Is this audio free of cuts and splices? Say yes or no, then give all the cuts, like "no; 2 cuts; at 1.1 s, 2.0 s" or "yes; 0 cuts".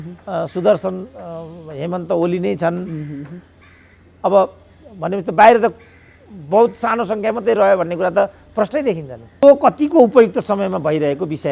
no; 1 cut; at 9.4 s